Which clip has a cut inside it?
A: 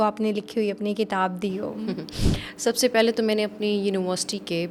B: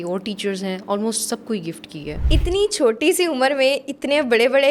B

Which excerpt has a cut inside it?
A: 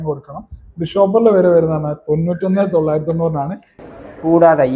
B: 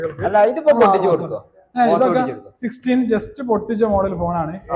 A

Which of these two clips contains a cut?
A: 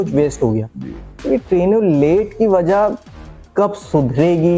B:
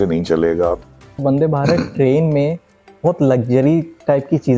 B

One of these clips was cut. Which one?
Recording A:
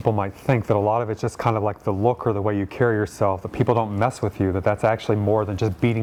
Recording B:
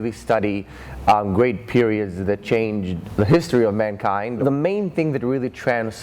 B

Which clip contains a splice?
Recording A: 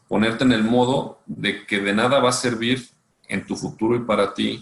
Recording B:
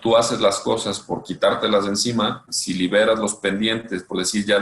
B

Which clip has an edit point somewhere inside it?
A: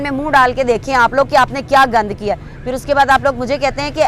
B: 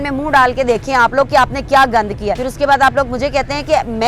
B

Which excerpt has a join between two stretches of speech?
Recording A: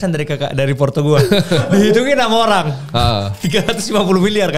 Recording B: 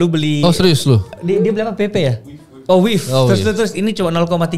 B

